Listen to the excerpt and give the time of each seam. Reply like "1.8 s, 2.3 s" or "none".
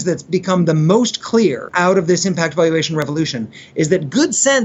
1.7 s